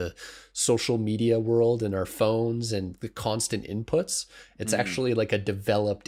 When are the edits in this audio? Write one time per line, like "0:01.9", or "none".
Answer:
none